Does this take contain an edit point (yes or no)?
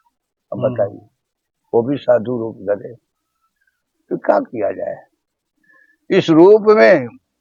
no